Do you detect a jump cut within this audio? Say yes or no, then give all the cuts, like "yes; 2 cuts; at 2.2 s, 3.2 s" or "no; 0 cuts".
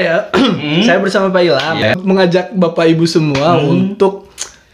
yes; 1 cut; at 1.8 s